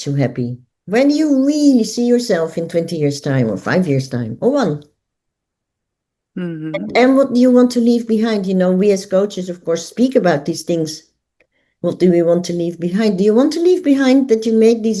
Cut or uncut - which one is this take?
uncut